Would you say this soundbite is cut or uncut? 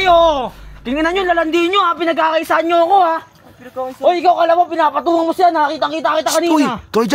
uncut